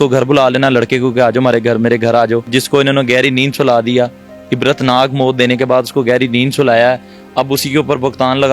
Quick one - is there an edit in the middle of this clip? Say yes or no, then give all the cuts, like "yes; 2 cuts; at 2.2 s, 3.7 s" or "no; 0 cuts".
yes; 1 cut; at 2.5 s